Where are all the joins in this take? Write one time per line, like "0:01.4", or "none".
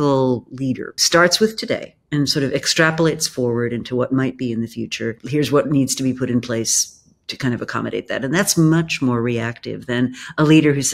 0:01.0
0:05.1